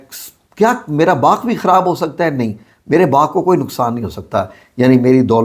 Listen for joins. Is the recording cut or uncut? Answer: uncut